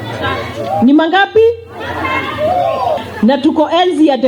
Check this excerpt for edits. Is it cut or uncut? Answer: cut